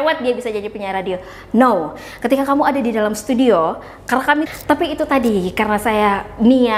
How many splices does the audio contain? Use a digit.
1